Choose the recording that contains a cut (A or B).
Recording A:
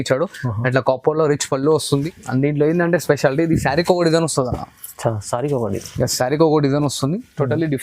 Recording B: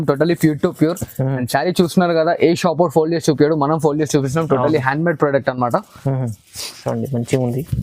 A